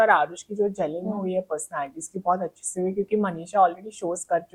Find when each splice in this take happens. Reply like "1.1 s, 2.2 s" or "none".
none

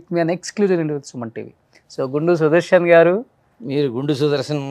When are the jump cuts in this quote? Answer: none

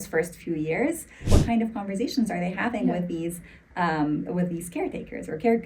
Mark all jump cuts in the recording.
1.2 s

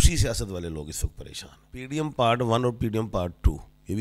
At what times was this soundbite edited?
1.8 s

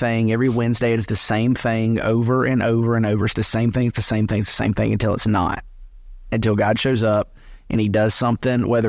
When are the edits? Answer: none

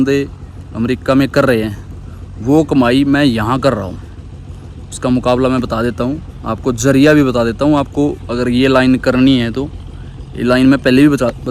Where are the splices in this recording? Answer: none

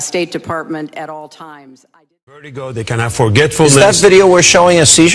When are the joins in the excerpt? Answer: 2.8 s

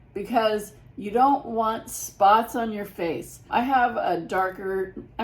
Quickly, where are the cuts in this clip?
3.5 s

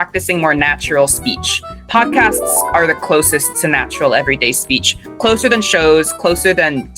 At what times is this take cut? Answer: 1.8 s

